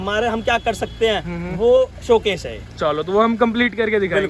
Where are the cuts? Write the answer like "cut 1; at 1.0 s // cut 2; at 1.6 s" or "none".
none